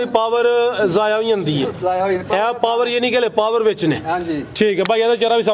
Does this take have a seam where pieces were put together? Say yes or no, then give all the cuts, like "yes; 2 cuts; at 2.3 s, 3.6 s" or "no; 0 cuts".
no; 0 cuts